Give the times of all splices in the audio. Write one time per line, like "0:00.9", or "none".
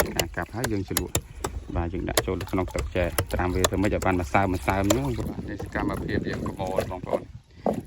0:05.2